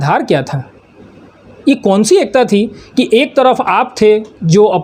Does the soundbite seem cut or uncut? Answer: uncut